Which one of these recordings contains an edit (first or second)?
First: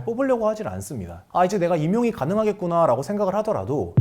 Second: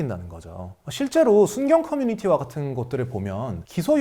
first